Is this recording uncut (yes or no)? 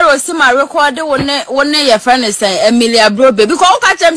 yes